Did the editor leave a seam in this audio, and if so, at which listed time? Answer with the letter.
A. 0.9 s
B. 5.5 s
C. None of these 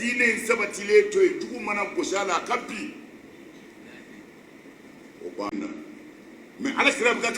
B